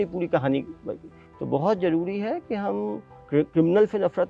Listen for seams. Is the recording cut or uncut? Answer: cut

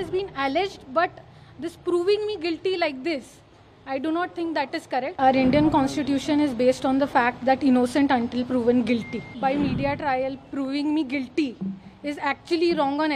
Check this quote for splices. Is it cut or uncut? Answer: cut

